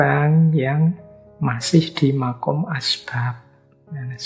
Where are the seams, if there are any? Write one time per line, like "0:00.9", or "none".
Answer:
none